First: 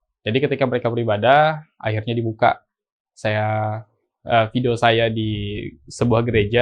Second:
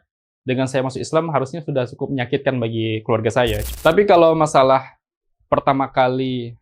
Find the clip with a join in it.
second; 1 cut; at 3.6 s

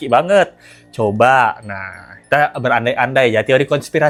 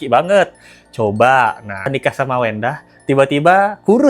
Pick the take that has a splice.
second; 1 cut; at 1.9 s

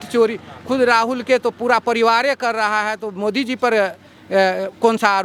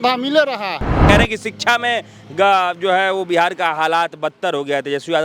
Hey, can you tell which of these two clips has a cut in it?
second; 1 cut; at 1.0 s

